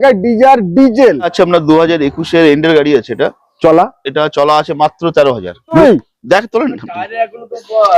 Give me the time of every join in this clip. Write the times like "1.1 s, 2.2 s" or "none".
1.3 s, 5.8 s

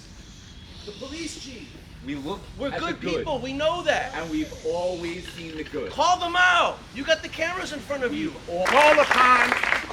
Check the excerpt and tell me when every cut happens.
8.7 s

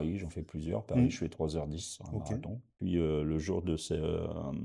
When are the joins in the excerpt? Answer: 2.7 s

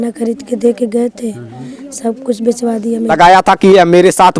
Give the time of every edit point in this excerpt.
3.1 s

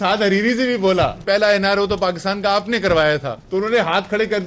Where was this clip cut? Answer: 1.2 s, 3.3 s

